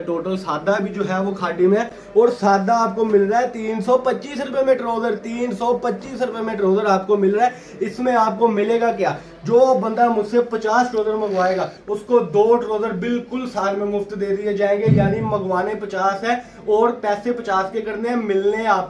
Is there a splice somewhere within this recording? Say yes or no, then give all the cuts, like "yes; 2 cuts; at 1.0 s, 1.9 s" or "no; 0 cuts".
no; 0 cuts